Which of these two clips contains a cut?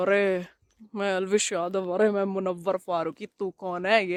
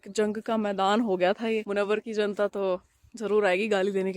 second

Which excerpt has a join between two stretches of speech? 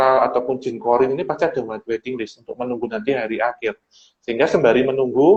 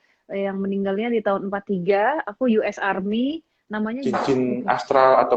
second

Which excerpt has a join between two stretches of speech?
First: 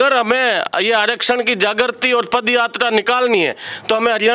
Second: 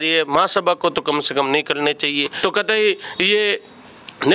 second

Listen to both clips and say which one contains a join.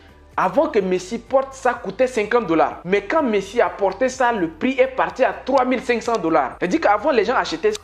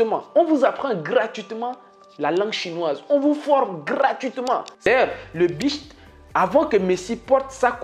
second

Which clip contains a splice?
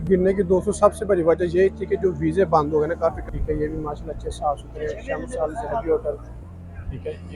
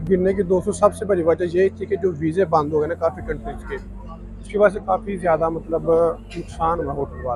first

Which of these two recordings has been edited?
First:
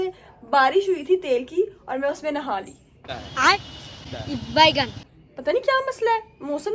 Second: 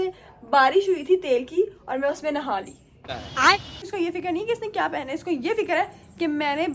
second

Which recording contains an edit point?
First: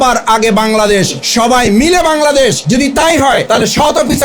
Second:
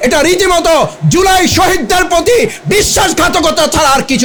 first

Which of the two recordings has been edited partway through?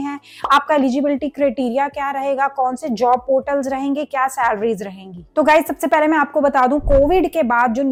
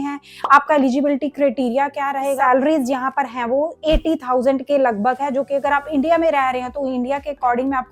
second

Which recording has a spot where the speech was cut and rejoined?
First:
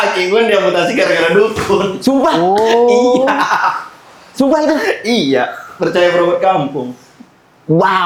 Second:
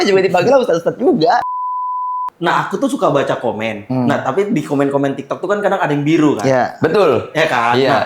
second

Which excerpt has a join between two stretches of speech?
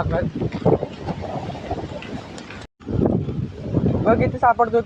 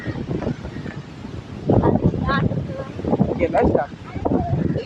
first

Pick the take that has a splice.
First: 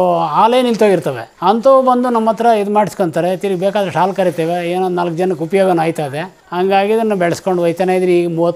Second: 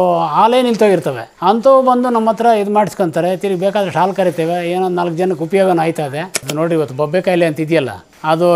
second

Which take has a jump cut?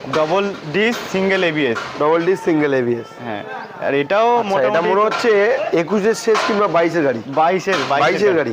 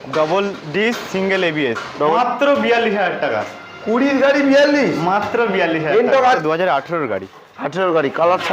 second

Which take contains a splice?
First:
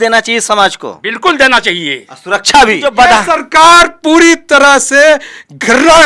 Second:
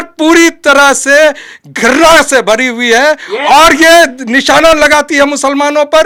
first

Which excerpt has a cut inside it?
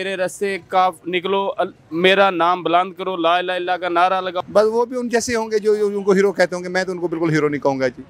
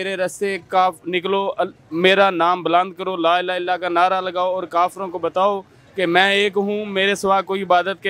first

